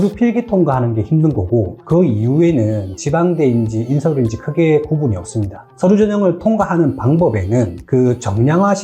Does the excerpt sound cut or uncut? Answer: cut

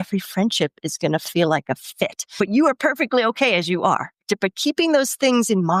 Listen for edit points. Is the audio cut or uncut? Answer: uncut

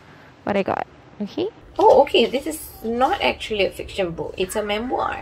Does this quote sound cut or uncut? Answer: cut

